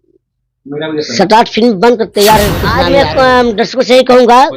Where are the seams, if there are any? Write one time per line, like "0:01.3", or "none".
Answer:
0:02.8